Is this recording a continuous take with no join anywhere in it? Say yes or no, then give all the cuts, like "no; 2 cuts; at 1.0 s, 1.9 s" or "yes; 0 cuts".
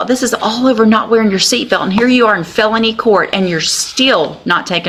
yes; 0 cuts